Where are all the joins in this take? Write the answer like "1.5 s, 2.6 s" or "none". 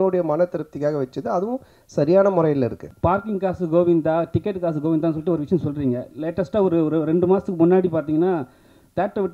2.9 s